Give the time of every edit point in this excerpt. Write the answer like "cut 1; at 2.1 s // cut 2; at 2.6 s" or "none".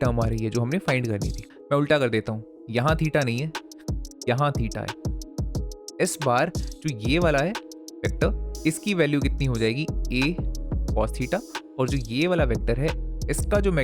cut 1; at 1.5 s

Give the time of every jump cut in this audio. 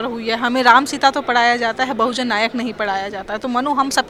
none

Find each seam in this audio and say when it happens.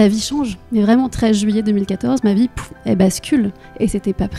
none

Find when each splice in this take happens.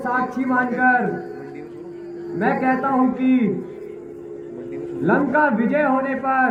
none

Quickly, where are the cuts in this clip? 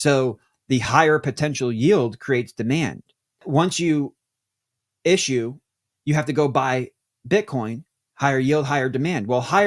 cut 1; at 3.4 s

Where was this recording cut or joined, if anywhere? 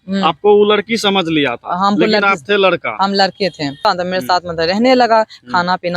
cut 1; at 3.8 s

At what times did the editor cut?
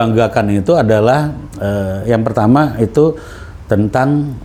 none

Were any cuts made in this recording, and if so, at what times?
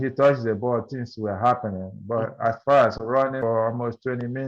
cut 1; at 3.4 s

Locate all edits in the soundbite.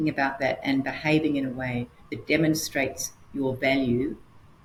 none

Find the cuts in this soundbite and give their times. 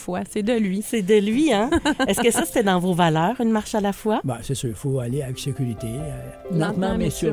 cut 1; at 6.4 s

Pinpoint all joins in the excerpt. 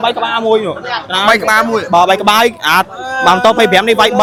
none

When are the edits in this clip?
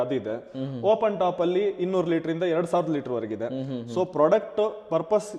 none

